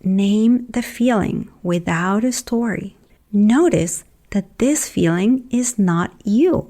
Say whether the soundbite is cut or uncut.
cut